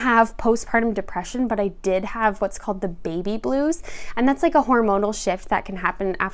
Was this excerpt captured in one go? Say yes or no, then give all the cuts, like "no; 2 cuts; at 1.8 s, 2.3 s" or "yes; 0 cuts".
yes; 0 cuts